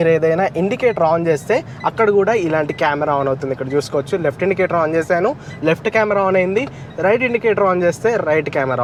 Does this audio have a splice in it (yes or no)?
no